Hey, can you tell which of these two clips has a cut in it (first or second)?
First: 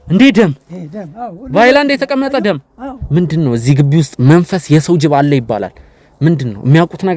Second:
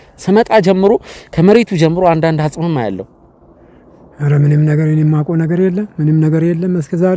first